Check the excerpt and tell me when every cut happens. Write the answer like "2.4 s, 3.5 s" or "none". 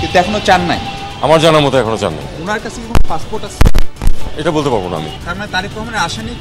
5.2 s